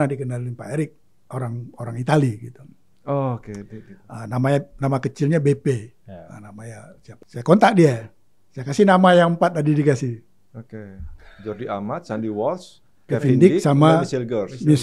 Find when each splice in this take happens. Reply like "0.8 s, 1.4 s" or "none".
7.2 s